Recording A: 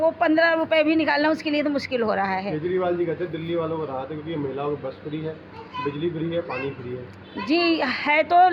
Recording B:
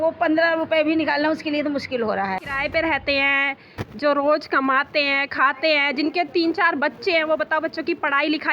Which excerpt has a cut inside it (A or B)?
B